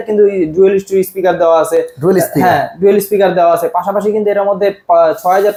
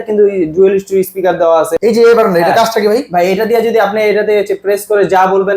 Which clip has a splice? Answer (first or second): second